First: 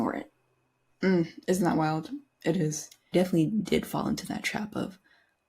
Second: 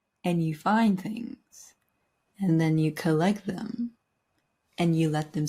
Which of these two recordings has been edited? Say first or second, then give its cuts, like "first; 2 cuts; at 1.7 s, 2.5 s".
first; 1 cut; at 3.1 s